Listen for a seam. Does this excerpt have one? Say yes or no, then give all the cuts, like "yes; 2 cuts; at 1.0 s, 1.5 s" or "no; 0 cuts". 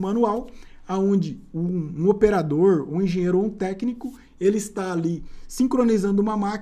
no; 0 cuts